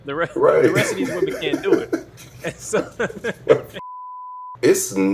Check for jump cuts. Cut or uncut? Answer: cut